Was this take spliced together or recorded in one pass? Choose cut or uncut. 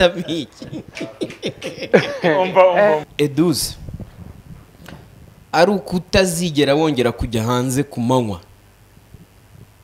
cut